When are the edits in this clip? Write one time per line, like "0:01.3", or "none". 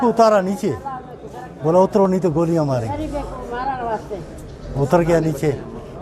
none